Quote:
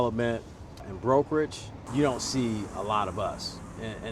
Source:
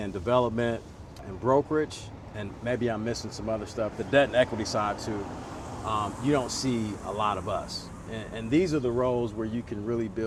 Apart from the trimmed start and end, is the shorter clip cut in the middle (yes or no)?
yes